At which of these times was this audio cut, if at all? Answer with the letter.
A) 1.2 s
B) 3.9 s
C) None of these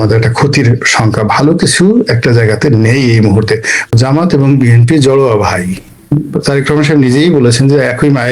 B